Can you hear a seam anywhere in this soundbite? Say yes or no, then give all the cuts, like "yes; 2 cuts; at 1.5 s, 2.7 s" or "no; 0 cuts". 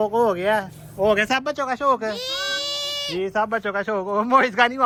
no; 0 cuts